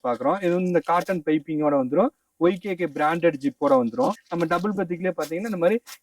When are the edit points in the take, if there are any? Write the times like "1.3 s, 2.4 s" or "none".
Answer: 4.2 s